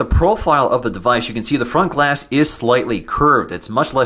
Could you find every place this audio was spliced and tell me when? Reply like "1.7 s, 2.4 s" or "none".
2.8 s